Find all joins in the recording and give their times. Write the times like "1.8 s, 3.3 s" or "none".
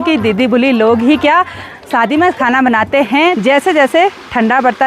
3.4 s